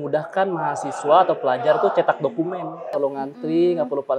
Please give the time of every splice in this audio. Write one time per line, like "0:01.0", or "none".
0:02.9